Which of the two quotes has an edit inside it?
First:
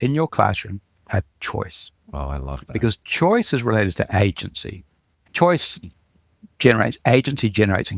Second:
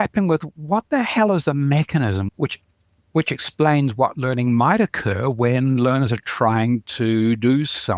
first; 1 cut; at 5.3 s

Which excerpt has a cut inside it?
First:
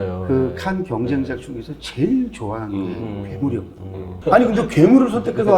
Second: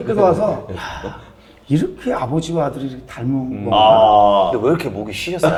first; 1 cut; at 4.0 s

